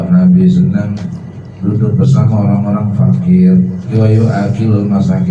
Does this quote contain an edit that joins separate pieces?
yes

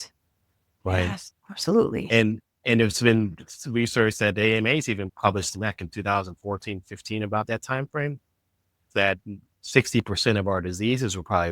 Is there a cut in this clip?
yes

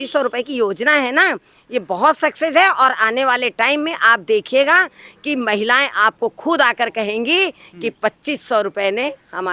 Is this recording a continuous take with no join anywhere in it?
yes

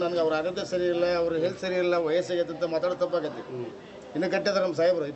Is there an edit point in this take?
no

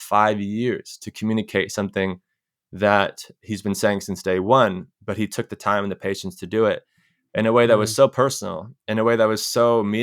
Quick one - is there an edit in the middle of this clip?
no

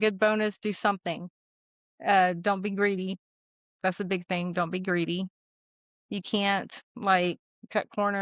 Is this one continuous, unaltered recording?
yes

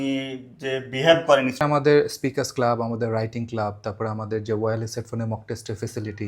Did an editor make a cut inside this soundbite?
yes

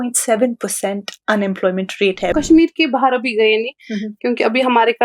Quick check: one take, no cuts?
no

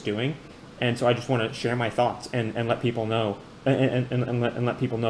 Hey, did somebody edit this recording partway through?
yes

